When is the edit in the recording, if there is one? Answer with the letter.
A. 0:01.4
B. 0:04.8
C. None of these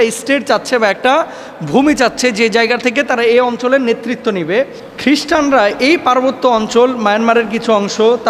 B